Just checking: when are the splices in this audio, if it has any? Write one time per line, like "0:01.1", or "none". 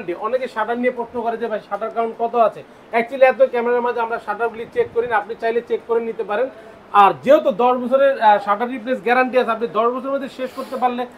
none